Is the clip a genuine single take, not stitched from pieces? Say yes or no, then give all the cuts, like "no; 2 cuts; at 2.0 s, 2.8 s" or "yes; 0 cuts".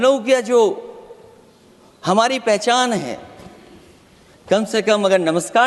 yes; 0 cuts